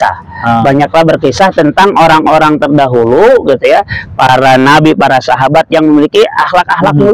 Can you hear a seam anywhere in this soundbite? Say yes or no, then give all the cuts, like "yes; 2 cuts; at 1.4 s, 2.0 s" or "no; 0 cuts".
no; 0 cuts